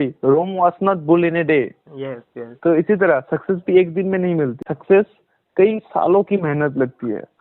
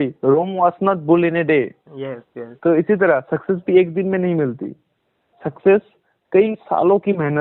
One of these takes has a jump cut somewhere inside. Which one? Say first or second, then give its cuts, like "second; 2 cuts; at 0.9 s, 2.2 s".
first; 1 cut; at 4.7 s